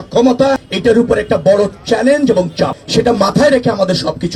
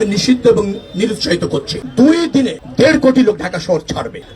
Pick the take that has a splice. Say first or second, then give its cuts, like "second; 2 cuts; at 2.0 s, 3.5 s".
second; 1 cut; at 1.8 s